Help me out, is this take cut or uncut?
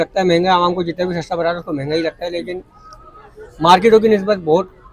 uncut